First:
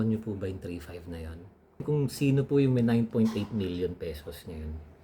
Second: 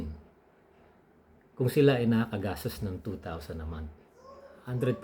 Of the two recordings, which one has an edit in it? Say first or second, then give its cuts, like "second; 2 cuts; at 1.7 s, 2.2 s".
first; 1 cut; at 1.8 s